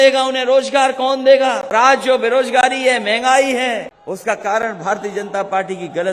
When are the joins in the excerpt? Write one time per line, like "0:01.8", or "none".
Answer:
0:01.7
0:03.9